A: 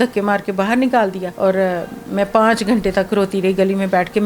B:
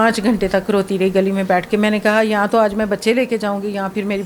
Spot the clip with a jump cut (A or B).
A